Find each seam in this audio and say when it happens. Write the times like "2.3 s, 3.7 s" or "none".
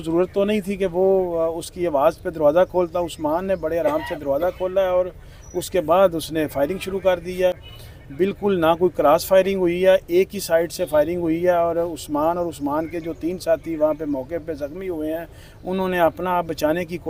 none